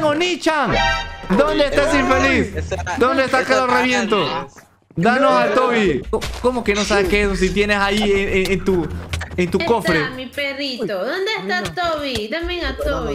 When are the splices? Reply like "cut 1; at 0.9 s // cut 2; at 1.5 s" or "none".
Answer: cut 1; at 1.2 s // cut 2; at 6.0 s